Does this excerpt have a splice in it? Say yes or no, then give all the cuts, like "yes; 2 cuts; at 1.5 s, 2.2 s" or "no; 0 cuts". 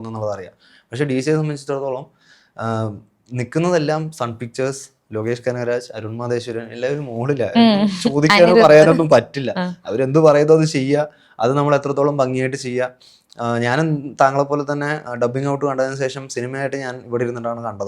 no; 0 cuts